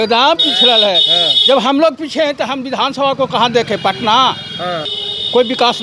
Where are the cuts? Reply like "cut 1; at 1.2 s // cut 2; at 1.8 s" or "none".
cut 1; at 4.9 s